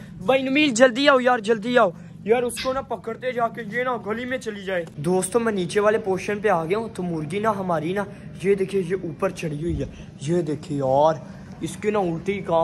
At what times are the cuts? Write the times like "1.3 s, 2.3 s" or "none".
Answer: none